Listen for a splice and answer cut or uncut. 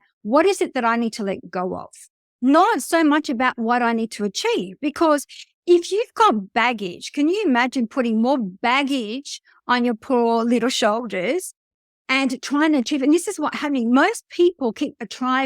cut